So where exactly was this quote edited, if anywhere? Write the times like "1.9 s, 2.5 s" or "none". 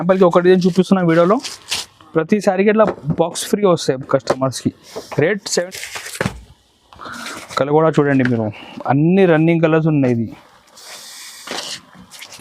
5.7 s